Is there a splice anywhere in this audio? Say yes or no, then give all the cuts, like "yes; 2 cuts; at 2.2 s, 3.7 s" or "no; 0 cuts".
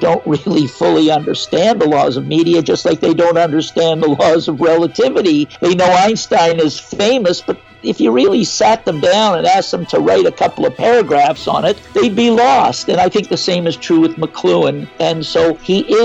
yes; 3 cuts; at 5.5 s, 11.8 s, 15.3 s